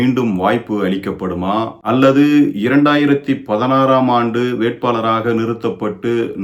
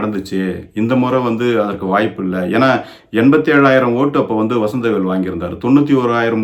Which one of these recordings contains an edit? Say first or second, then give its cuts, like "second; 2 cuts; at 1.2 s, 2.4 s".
first; 1 cut; at 1.8 s